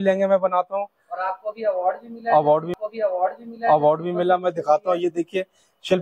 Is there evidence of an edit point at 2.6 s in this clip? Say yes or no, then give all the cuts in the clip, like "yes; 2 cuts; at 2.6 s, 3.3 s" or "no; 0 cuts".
no; 0 cuts